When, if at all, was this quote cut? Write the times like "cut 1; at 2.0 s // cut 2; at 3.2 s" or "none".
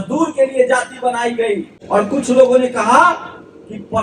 cut 1; at 1.7 s